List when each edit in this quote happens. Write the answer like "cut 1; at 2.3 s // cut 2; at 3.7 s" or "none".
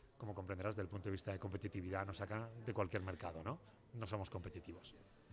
none